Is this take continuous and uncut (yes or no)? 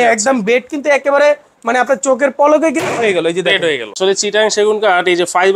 no